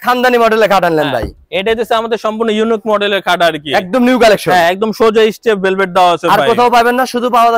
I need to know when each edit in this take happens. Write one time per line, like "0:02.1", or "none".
none